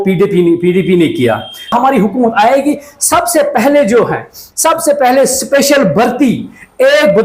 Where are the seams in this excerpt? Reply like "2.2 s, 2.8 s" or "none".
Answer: 1.7 s